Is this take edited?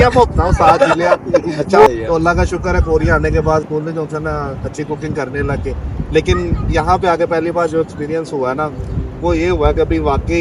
no; 0 cuts

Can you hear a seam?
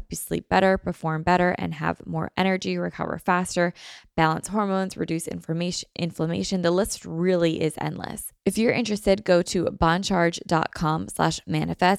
yes; 1 cut; at 8.2 s

